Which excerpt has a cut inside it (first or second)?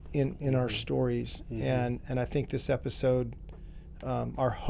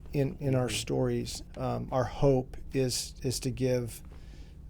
second